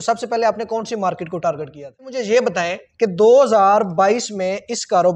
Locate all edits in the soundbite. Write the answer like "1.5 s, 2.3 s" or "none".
2.2 s